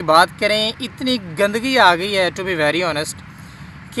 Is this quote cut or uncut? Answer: uncut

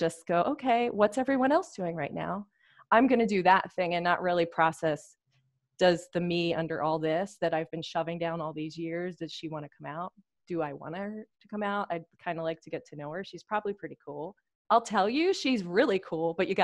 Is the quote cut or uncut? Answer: uncut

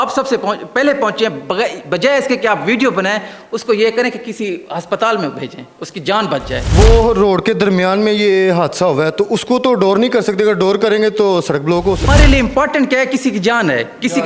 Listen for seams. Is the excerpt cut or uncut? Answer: cut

